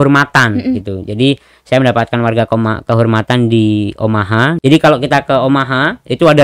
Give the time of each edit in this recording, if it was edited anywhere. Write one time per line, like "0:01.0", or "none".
0:04.6